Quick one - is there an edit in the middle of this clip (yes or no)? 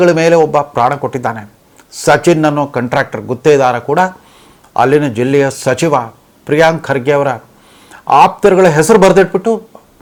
no